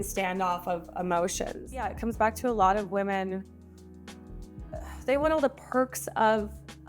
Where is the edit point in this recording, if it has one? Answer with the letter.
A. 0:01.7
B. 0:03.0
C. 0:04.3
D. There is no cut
A